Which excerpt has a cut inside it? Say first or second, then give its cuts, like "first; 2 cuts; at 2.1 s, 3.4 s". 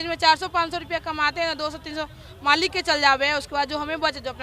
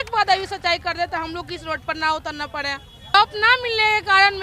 second; 1 cut; at 3.1 s